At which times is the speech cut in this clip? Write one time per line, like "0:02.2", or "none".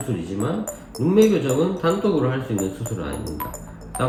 none